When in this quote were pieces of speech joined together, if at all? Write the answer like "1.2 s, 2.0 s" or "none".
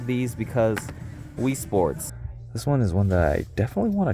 2.0 s